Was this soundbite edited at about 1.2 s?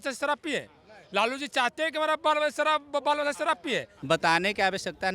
no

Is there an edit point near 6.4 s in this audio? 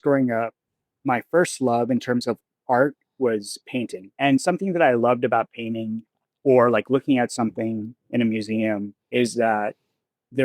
no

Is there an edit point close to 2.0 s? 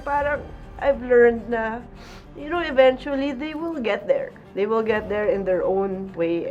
no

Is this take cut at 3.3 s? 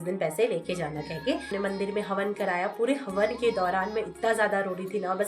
no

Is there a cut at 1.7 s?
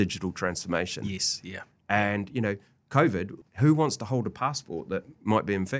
no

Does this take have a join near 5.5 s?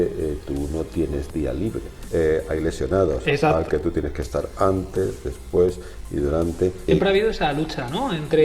no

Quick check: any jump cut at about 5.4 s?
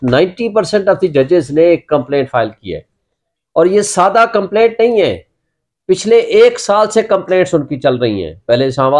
no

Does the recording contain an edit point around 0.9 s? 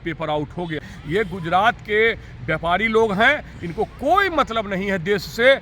yes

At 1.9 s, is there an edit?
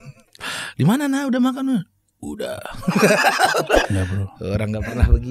no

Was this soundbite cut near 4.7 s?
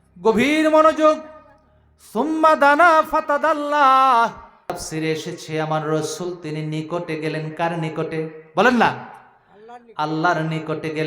yes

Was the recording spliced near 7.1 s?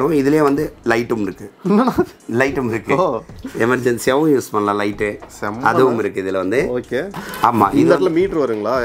yes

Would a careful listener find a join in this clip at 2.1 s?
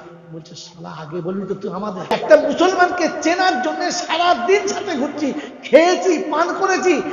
yes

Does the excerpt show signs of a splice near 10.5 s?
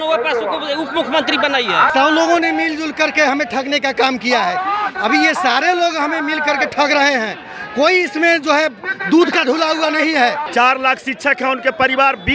yes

